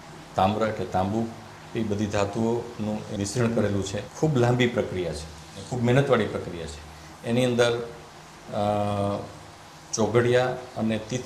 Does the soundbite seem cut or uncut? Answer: cut